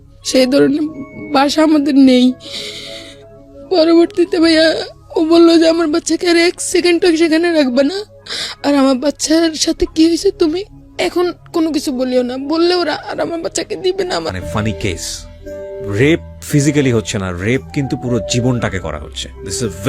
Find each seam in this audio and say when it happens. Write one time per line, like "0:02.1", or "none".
0:14.3